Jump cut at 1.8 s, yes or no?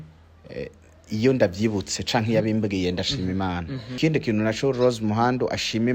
no